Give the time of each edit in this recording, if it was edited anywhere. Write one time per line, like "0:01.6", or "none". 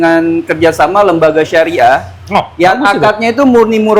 none